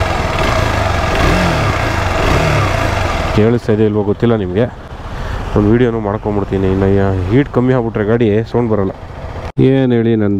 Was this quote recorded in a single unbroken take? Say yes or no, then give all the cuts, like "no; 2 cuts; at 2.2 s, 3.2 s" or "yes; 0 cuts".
yes; 0 cuts